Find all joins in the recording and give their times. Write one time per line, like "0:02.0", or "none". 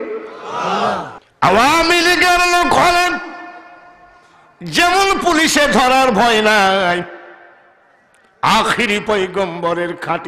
0:01.2